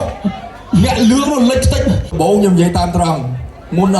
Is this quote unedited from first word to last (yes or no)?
no